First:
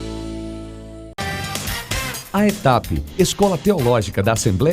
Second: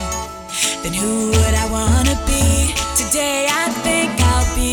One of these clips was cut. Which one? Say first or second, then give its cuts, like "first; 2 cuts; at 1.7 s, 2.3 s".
first; 1 cut; at 1.1 s